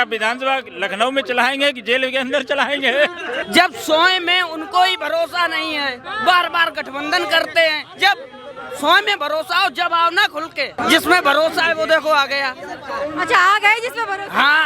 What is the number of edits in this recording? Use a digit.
2